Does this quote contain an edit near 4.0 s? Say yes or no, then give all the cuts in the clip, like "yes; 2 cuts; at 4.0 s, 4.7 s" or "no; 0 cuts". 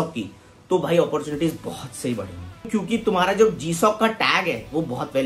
no; 1 cut; at 2.7 s